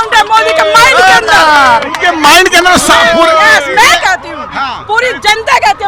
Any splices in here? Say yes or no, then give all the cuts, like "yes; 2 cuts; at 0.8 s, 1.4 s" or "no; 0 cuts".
no; 0 cuts